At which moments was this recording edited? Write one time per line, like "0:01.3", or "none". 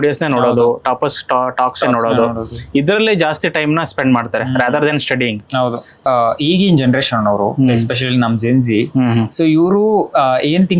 0:06.0

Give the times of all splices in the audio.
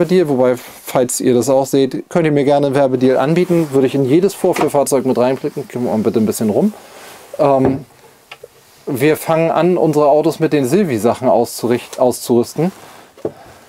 none

